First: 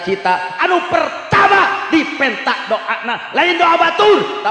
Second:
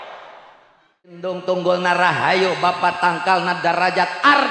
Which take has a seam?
second; 1 cut; at 1.3 s

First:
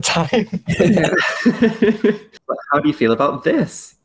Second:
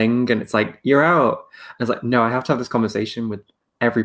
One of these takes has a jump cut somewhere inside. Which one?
first; 1 cut; at 2.3 s

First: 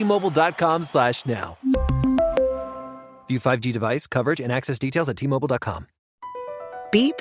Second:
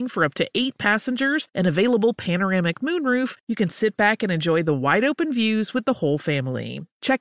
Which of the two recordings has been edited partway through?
first; 1 cut; at 6.2 s

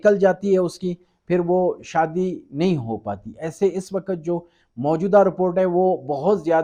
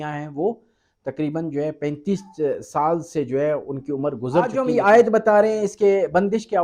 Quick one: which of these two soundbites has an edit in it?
second; 1 cut; at 4.5 s

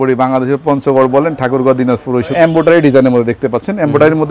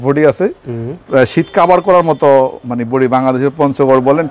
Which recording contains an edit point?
first; 1 cut; at 2.3 s

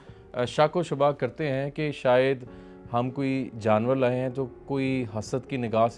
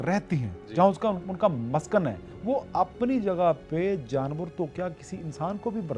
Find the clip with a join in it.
second; 1 cut; at 2.3 s

